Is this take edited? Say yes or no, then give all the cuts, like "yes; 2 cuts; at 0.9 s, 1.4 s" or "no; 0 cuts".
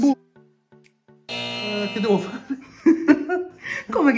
yes; 1 cut; at 1.7 s